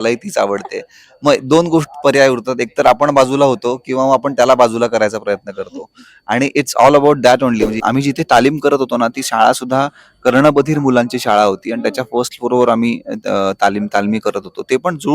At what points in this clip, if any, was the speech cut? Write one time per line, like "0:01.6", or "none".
0:07.8